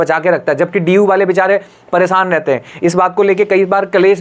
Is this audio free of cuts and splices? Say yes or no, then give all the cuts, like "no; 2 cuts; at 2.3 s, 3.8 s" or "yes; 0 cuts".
yes; 0 cuts